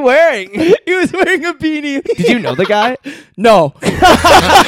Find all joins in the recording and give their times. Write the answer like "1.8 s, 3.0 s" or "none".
2.0 s